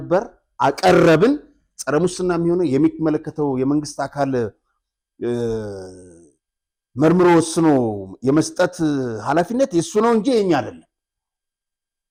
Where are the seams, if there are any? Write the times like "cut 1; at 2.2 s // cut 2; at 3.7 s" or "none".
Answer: none